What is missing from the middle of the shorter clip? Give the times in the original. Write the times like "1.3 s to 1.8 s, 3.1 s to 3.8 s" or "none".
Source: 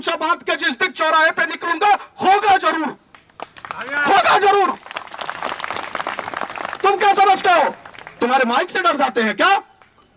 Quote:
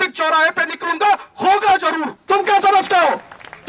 3.0 s to 6.7 s